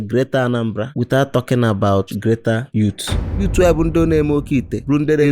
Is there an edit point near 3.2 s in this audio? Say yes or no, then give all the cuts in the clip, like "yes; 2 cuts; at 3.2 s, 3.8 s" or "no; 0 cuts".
yes; 1 cut; at 3.2 s